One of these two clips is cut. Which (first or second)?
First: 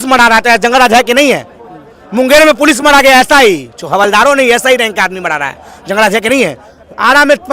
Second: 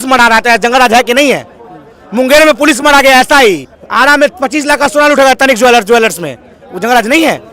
second